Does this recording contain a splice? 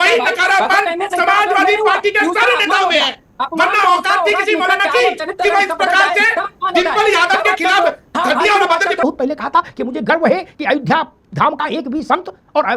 yes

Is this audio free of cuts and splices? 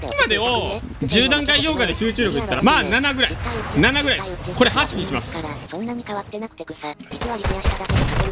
no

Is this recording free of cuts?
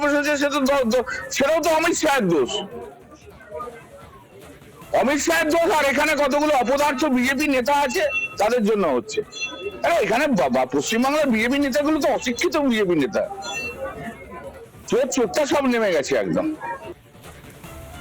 yes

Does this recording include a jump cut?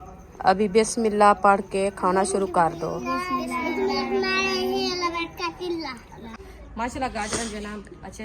yes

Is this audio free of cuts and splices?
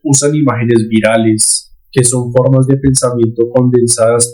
yes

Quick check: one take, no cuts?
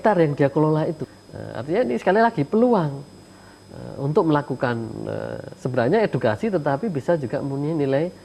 no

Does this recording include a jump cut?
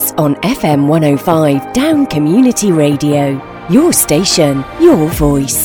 no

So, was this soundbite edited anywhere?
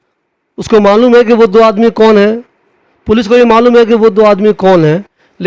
no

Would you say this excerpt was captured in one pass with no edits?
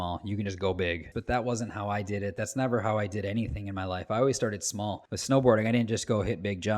no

